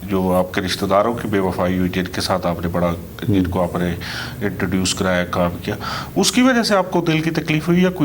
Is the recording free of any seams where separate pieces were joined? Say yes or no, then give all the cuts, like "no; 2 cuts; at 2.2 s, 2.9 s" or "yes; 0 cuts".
yes; 0 cuts